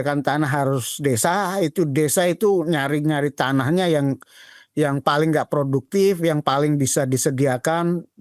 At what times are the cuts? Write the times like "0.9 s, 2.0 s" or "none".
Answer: none